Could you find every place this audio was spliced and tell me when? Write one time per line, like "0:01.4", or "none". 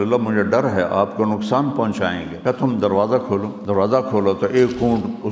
0:02.3
0:03.6